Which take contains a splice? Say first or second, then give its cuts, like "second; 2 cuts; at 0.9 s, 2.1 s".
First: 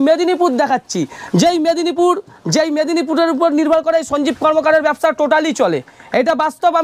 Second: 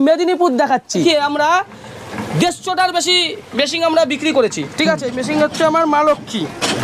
second; 1 cut; at 1.0 s